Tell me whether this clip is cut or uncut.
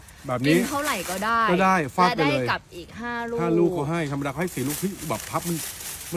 uncut